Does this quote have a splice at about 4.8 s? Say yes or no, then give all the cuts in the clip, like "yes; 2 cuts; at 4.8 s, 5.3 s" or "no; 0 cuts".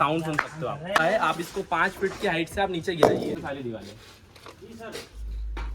no; 2 cuts; at 1.0 s, 3.4 s